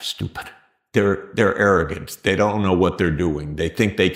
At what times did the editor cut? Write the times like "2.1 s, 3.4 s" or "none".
none